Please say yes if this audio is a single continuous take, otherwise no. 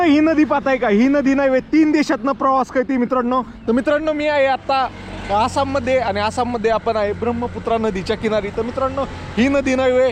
yes